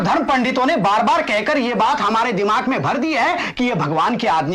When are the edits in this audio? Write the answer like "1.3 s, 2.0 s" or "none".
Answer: none